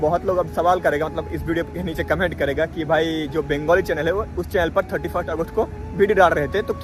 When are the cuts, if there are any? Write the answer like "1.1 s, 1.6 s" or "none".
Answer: none